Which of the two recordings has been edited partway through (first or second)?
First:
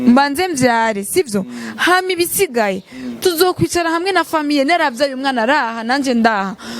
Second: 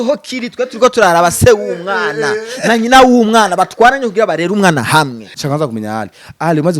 second